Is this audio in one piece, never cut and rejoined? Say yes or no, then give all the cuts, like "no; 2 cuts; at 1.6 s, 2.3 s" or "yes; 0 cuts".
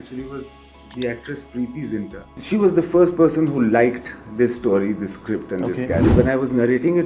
no; 2 cuts; at 2.2 s, 6.1 s